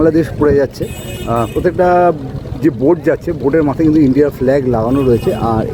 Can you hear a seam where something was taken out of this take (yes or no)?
no